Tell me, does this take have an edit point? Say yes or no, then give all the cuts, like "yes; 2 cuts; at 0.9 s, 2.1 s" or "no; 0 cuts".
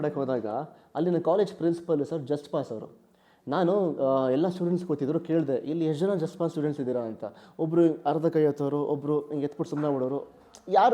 no; 0 cuts